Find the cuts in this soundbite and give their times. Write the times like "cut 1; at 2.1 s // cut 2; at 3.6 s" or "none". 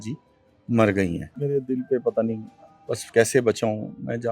cut 1; at 1.4 s